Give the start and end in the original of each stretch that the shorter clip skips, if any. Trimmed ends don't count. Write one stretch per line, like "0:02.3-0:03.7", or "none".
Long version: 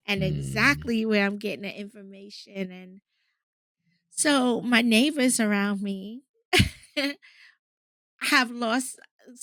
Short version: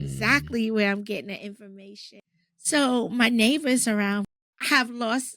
0:02.3-0:03.5
0:05.8-0:07.9